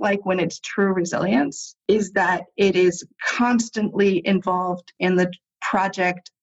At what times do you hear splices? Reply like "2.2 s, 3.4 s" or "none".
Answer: 1.7 s